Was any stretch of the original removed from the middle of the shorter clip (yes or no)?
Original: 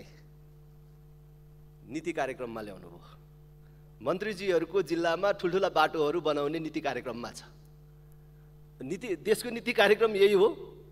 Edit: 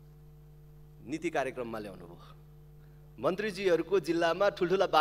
no